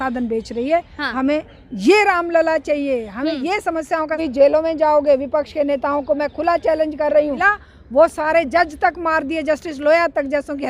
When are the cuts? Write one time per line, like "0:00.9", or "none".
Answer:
0:04.2
0:07.6